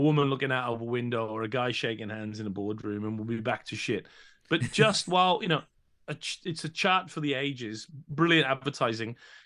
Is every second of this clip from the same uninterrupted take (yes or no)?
yes